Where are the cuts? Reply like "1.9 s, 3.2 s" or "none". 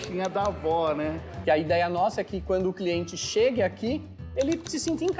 1.3 s